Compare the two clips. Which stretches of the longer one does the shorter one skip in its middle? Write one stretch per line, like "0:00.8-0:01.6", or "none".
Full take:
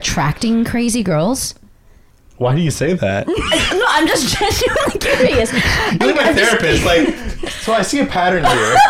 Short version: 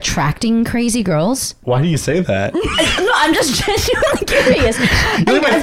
0:01.5-0:02.2